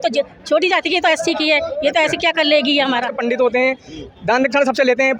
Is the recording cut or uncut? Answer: cut